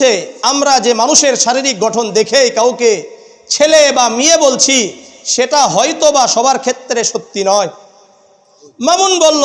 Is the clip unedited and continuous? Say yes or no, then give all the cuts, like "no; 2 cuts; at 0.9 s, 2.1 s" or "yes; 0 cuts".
yes; 0 cuts